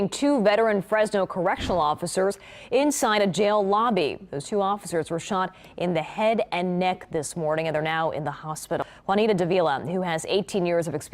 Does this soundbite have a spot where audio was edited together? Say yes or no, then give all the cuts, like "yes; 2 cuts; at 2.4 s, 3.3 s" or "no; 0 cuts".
yes; 1 cut; at 8.8 s